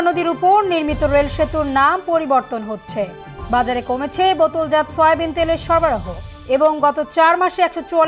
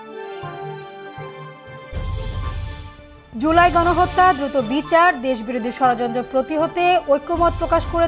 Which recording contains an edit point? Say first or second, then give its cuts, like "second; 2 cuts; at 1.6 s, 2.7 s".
second; 1 cut; at 2.6 s